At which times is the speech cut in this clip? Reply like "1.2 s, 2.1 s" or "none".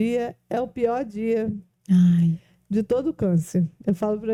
none